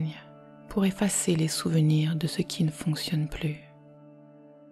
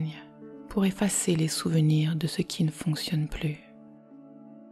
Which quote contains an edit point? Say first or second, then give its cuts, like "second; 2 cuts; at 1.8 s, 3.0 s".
second; 1 cut; at 3.6 s